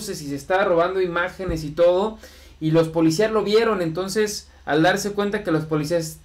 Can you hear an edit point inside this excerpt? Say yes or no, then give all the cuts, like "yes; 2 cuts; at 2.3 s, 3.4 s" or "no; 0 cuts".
no; 0 cuts